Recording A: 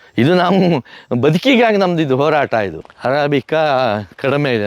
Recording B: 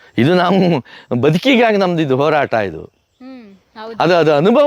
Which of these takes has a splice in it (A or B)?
A